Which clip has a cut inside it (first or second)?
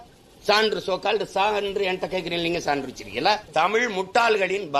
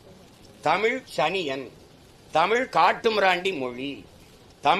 first